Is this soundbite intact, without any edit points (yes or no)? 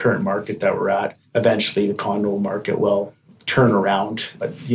no